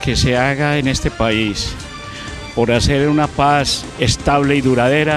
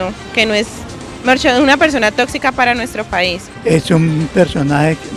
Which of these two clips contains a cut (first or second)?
second